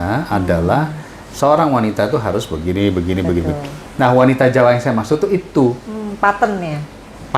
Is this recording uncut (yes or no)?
yes